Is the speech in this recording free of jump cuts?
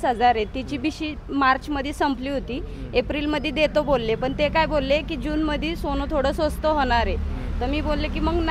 yes; 0 cuts

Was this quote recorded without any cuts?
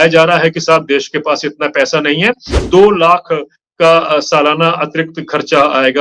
no; 1 cut; at 2.5 s

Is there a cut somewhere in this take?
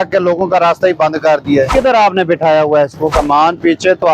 yes; 2 cuts; at 1.7 s, 3.1 s

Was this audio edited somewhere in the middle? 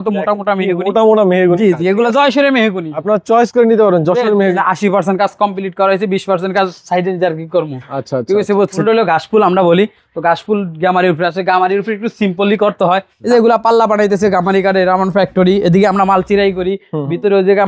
yes; 3 cuts; at 4.6 s, 8.8 s, 13.1 s

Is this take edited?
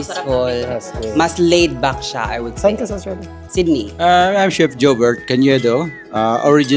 yes; 1 cut; at 3.9 s

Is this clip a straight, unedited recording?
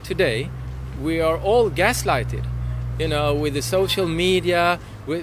yes; 0 cuts

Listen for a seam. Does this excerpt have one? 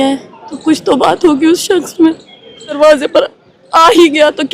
yes; 1 cut; at 2.8 s

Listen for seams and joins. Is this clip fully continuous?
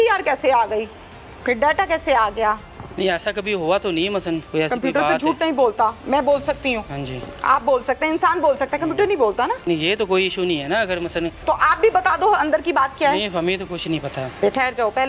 no; 5 cuts; at 2.8 s, 4.5 s, 9.7 s, 11.4 s, 14.4 s

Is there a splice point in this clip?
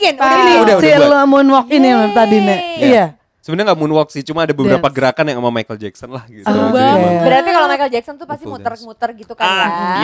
no; 0 cuts

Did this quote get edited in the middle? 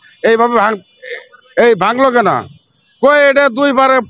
no; 0 cuts

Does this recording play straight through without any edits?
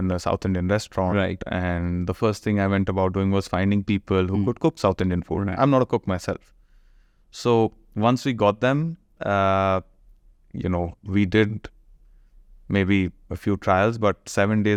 yes; 0 cuts

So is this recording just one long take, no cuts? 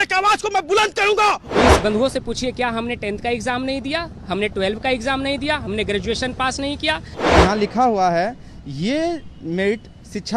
no; 2 cuts; at 1.4 s, 7.1 s

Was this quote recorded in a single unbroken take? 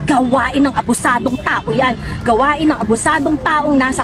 yes; 0 cuts

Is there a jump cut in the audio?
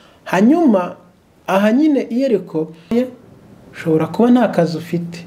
yes; 1 cut; at 2.9 s

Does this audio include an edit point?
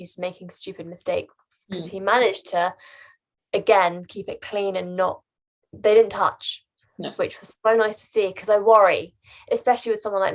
no; 0 cuts

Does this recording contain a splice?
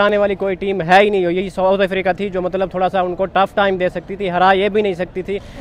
no; 0 cuts

